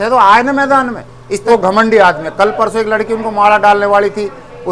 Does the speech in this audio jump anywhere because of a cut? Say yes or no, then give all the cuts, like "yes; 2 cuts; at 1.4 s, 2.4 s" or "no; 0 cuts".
yes; 1 cut; at 1.5 s